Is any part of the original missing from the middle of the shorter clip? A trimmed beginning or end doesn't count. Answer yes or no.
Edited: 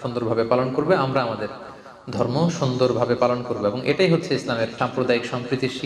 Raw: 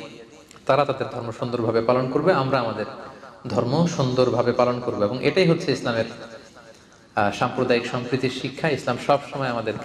yes